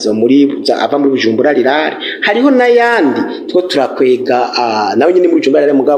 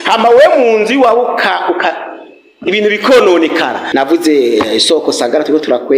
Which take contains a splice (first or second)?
second